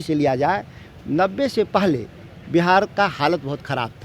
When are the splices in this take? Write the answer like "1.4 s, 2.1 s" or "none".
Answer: none